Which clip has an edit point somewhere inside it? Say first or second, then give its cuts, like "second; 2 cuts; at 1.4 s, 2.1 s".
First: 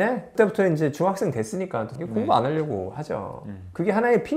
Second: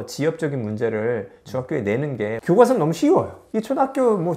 first; 1 cut; at 1.9 s